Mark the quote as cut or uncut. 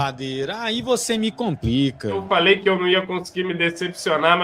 cut